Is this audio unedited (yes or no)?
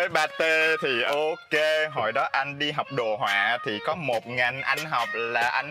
no